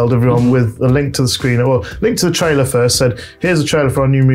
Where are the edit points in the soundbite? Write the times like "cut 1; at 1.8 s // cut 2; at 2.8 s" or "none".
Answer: none